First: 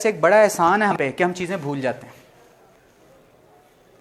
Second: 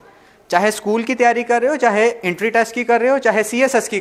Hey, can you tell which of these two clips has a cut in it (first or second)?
first